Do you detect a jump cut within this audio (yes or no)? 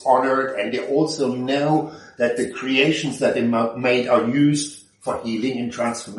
no